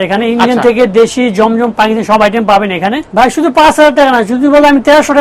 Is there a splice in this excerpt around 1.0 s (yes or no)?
no